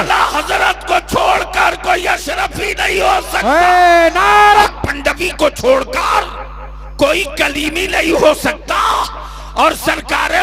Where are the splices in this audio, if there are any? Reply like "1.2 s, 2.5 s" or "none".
4.6 s